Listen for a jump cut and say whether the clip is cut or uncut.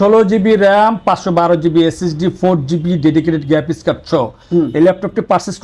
uncut